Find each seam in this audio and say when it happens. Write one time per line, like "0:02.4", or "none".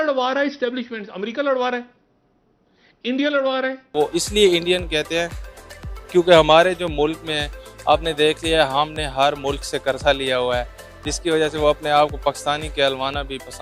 0:03.9